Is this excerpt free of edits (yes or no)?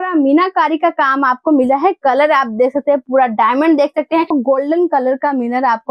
no